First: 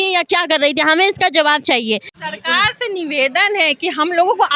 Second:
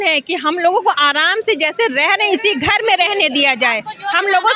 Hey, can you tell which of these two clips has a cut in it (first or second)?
first